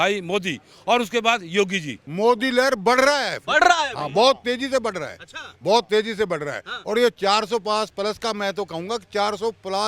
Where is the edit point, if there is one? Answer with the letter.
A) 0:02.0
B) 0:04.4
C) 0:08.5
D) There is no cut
A